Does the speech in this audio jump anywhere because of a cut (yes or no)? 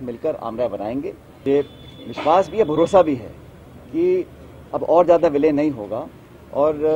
yes